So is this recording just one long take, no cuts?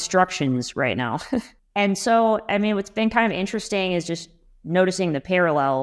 yes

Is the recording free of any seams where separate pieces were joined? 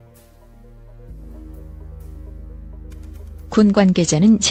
yes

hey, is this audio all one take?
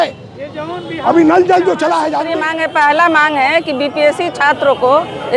no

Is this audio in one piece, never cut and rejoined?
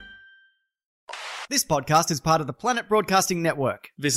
no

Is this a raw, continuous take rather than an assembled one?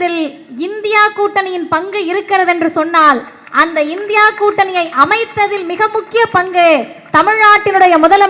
yes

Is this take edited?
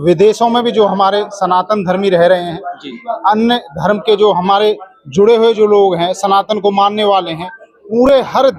no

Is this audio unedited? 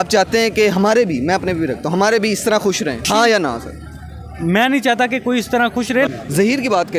no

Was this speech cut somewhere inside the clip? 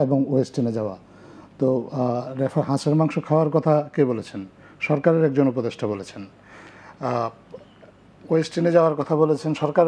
no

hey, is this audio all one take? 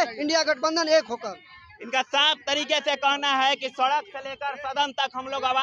yes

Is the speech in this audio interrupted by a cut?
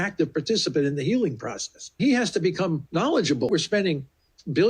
yes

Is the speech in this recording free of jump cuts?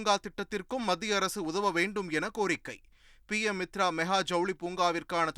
yes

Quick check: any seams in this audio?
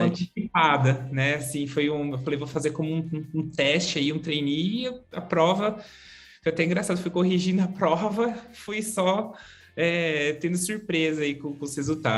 no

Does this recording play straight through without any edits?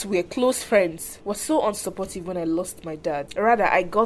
no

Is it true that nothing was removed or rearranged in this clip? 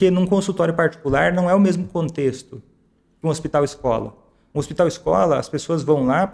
yes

